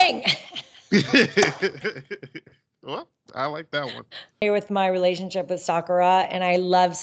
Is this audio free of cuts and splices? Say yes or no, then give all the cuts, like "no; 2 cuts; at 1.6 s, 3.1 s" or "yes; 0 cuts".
no; 1 cut; at 4.4 s